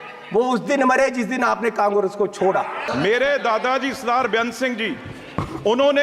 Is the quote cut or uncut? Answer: cut